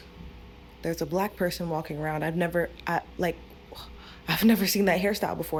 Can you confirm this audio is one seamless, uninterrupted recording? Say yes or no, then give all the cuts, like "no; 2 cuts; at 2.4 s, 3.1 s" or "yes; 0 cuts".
yes; 0 cuts